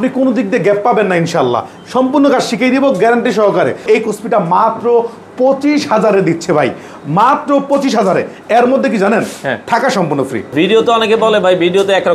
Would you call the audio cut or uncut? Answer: cut